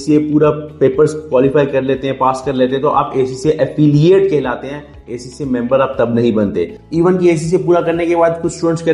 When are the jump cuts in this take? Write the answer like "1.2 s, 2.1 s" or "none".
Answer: 6.8 s